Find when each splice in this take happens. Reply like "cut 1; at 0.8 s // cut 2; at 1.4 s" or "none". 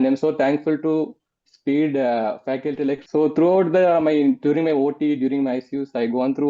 cut 1; at 3.0 s